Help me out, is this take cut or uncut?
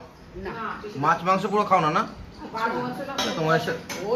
uncut